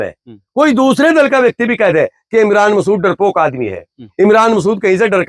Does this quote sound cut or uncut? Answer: uncut